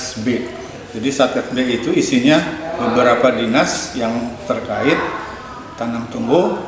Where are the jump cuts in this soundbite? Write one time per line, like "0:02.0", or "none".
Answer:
none